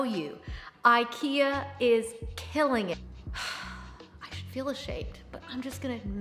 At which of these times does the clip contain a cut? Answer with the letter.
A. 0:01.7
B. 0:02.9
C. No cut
B